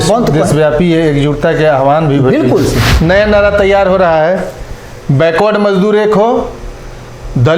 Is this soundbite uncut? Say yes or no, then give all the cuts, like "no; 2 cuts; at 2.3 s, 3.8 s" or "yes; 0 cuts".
no; 1 cut; at 2.9 s